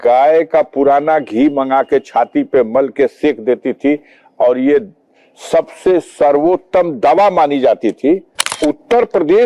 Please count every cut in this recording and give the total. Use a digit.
1